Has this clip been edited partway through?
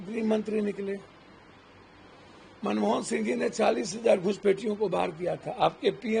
no; 0 cuts

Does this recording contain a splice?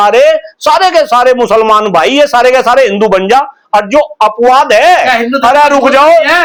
no; 0 cuts

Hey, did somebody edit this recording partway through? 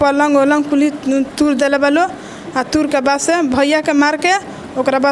no; 0 cuts

